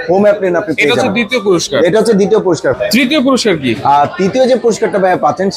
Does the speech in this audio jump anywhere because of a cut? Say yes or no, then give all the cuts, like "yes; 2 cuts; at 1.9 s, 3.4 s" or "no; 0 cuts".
no; 0 cuts